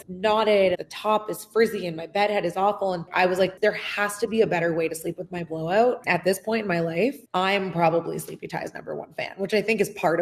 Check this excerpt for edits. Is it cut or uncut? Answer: cut